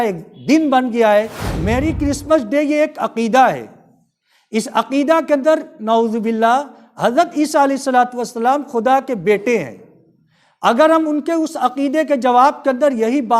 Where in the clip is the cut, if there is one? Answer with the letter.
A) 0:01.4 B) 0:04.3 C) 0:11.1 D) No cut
A